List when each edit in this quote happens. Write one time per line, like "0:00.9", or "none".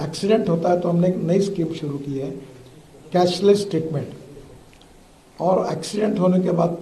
none